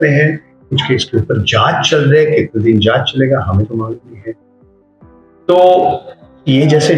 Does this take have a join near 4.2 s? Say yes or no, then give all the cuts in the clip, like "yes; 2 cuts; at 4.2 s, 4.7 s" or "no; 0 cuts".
no; 0 cuts